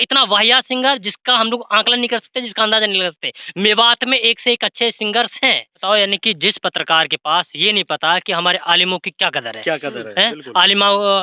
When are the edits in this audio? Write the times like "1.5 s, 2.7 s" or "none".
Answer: 5.8 s